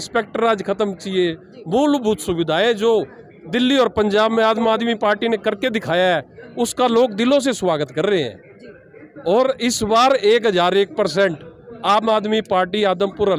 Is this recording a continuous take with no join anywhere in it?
yes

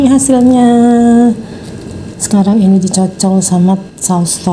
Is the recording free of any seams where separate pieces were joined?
yes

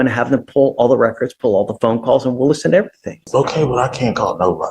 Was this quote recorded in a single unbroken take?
no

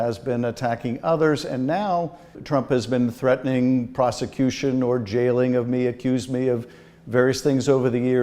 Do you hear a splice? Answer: yes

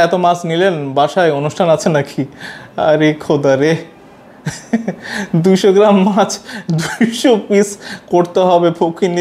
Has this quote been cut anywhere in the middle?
no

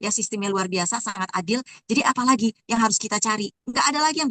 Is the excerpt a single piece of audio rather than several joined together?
yes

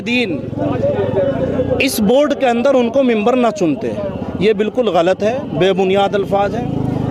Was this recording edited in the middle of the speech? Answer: no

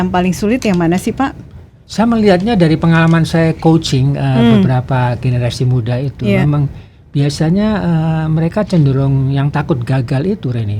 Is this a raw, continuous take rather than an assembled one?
yes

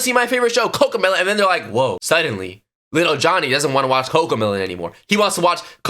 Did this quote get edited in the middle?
no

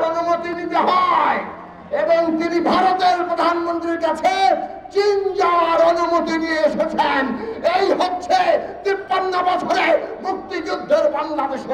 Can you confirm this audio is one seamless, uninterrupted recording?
yes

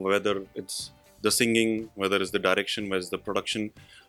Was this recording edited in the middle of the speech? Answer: no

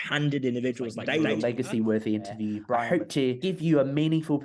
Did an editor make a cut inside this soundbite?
yes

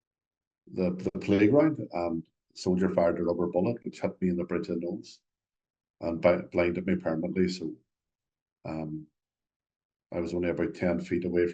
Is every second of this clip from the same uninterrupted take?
yes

